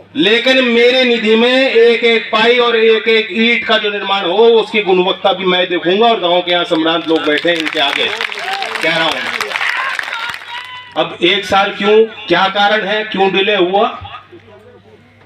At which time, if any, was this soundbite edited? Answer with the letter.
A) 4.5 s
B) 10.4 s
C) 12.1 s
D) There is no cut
B